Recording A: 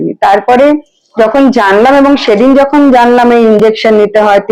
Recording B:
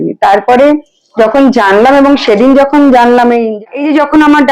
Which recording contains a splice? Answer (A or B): B